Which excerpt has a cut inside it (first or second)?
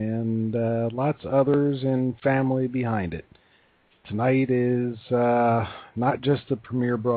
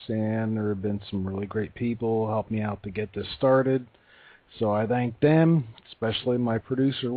second